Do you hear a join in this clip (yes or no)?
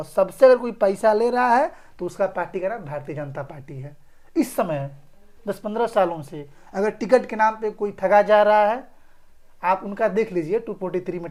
no